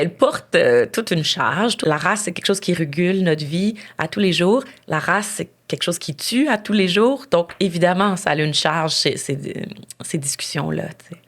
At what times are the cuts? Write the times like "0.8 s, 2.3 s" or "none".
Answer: 1.8 s